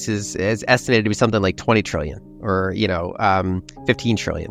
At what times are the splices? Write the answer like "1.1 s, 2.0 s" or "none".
none